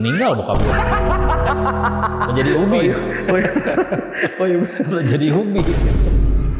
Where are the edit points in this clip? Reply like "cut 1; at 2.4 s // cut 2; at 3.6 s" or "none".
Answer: none